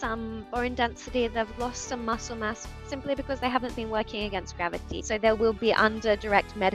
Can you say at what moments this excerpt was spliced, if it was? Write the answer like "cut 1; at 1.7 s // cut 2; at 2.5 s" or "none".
cut 1; at 4.9 s